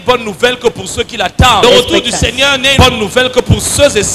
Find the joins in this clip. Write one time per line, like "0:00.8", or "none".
0:01.6
0:02.7